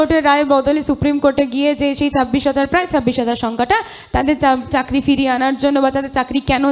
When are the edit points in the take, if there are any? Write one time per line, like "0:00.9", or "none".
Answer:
none